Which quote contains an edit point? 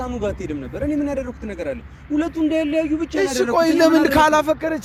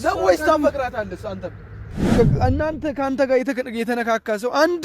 second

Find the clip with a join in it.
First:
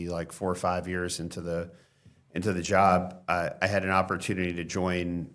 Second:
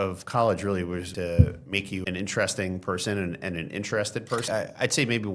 second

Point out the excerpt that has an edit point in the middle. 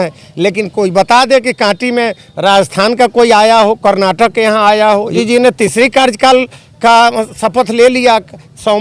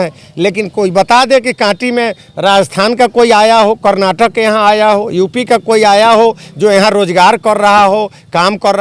first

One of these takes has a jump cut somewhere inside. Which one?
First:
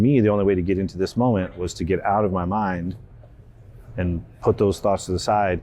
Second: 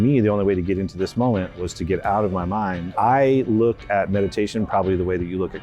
second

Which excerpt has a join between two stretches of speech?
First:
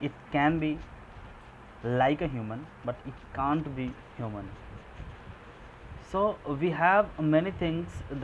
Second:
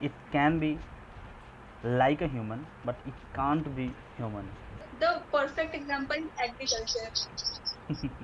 second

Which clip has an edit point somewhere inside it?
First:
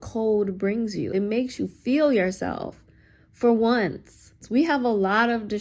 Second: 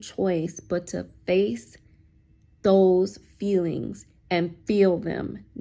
first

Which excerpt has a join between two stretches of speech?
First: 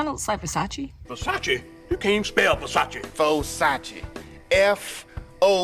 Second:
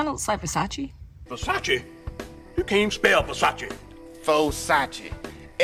first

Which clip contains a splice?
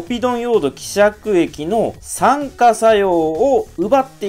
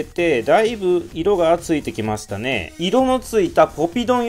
second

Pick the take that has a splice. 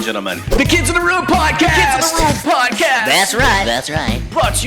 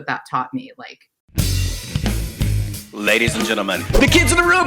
second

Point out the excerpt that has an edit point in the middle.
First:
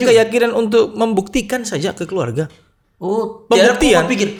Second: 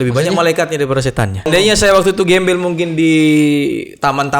second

